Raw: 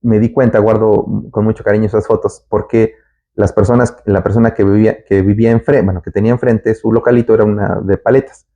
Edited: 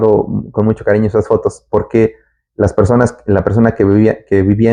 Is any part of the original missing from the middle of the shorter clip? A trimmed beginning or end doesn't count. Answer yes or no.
no